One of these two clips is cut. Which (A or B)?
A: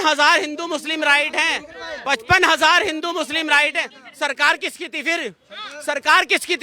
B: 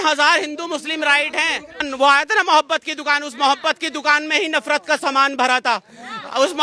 B